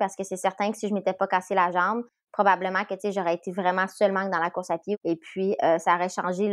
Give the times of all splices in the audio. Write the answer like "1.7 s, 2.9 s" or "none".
5.0 s